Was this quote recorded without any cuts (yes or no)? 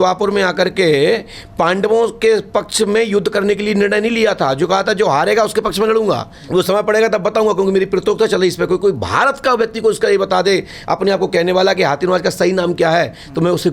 no